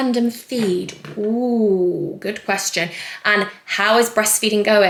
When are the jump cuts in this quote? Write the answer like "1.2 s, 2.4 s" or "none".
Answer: none